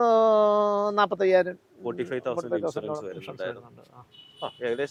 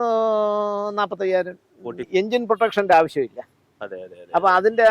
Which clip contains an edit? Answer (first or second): second